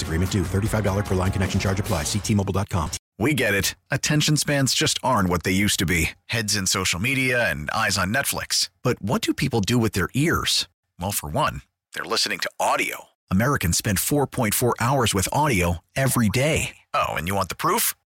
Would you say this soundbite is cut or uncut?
cut